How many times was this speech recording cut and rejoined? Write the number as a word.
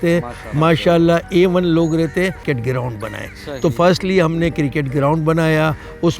one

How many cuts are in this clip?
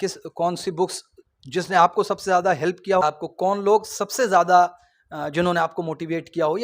one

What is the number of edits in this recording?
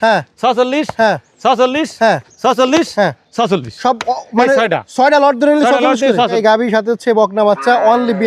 one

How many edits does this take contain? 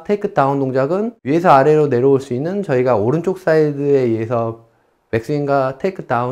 one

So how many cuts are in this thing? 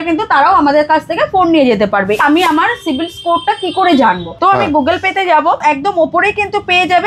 three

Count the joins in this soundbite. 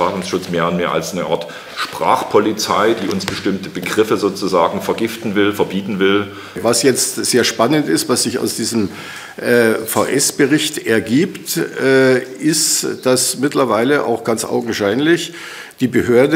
one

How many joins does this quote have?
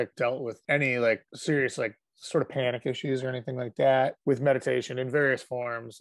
zero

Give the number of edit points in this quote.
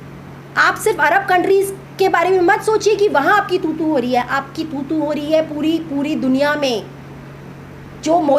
zero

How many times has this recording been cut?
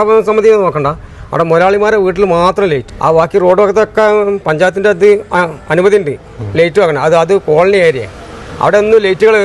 one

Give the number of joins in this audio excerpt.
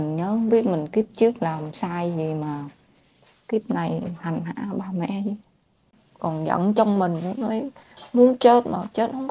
one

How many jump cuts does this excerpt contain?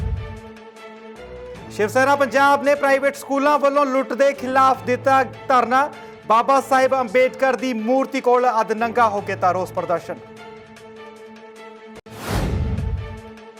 zero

